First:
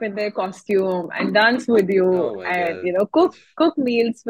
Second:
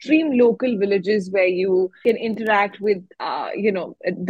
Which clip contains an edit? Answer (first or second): second